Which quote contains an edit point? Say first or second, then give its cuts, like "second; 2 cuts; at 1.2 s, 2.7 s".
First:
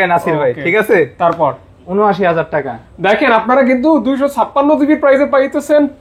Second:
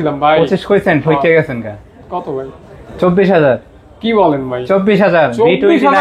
first; 1 cut; at 1.8 s